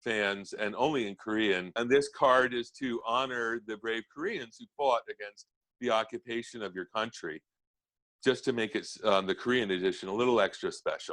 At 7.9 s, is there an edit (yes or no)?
yes